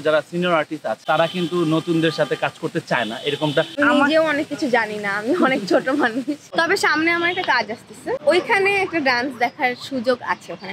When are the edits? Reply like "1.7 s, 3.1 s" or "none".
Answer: 3.8 s, 6.5 s, 8.2 s